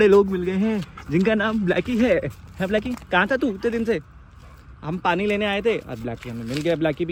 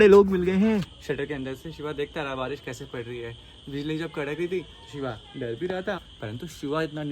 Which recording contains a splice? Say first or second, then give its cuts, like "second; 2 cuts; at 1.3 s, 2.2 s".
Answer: second; 2 cuts; at 0.9 s, 6.1 s